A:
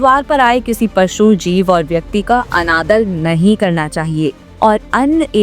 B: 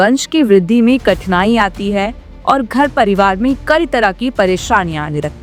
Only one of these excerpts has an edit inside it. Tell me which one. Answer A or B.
A